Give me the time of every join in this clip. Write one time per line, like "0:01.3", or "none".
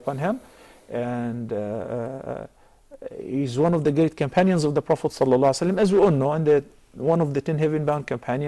none